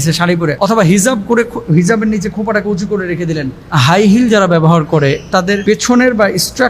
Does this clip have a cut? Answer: yes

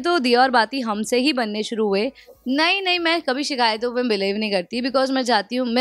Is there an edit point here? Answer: yes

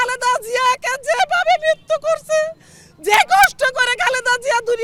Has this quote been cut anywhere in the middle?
no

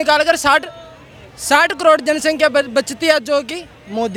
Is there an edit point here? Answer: no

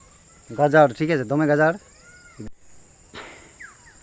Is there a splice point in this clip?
yes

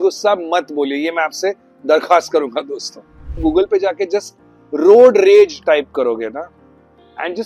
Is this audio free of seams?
no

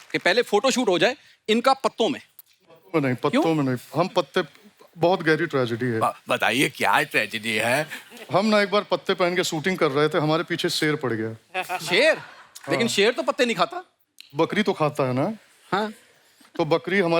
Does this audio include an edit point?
no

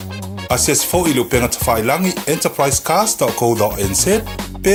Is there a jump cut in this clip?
no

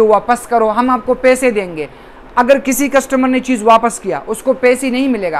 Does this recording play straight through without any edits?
yes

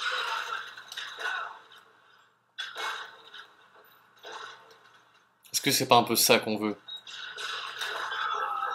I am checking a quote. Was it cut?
no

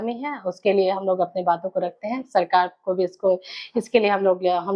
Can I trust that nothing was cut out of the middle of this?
yes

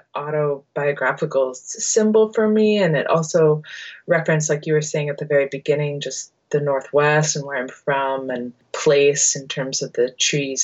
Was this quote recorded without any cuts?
yes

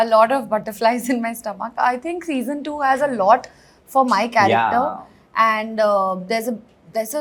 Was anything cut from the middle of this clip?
no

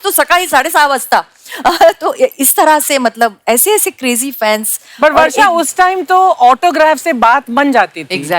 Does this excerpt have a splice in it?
no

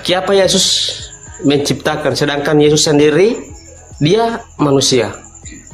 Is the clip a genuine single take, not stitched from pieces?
yes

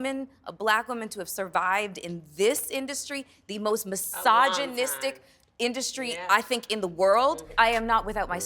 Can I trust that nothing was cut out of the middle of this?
no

